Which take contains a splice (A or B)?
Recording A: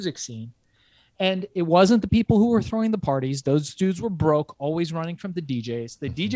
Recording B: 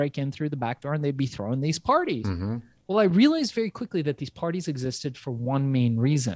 B